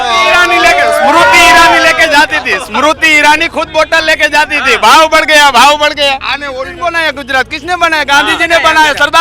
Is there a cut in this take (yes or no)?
yes